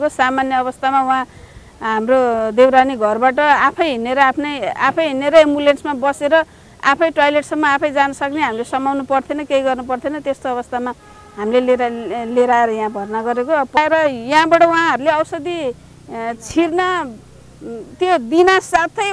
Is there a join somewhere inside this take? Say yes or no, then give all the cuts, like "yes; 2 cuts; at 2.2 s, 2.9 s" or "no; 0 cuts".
yes; 1 cut; at 13.8 s